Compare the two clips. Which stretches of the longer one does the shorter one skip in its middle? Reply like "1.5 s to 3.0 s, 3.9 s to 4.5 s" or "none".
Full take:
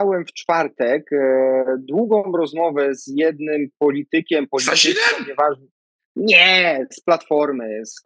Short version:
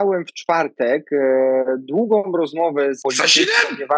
3.0 s to 4.5 s